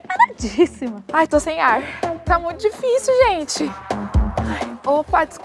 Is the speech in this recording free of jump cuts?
no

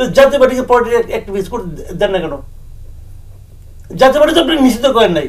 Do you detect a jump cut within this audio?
no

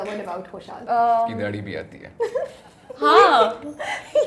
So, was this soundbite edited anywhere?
yes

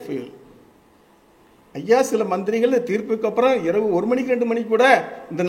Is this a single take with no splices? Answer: no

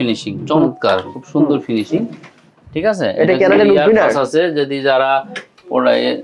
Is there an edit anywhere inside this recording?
no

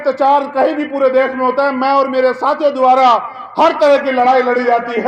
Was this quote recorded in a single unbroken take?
yes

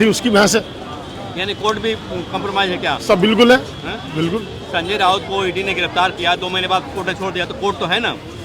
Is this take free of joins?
yes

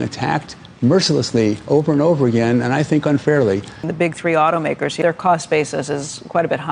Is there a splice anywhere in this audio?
yes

